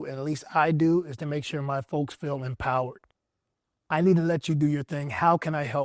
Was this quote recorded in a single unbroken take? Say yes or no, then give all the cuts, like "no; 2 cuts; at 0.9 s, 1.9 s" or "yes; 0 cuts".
yes; 0 cuts